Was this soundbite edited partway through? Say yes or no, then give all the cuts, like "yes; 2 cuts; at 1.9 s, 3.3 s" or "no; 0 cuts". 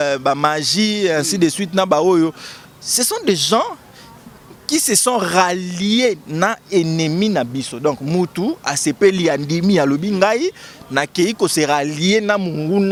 no; 0 cuts